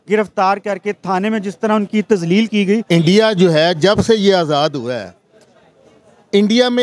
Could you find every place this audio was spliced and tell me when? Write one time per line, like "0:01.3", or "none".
0:02.8